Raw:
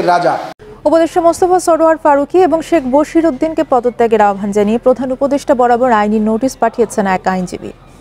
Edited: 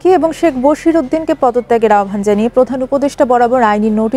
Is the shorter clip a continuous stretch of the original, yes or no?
yes